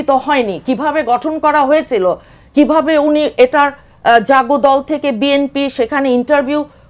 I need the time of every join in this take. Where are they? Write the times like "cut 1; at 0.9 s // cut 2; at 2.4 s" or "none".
none